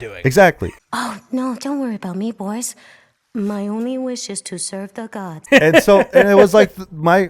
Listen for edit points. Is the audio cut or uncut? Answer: uncut